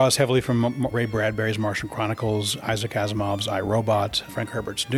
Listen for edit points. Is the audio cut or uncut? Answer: uncut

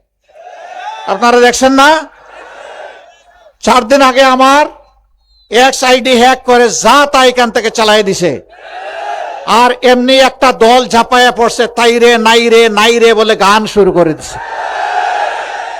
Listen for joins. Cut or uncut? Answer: uncut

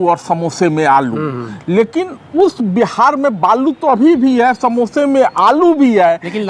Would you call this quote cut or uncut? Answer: uncut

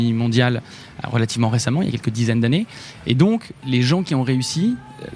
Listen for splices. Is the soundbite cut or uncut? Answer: cut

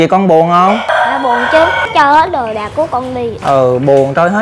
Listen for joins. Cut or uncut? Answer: cut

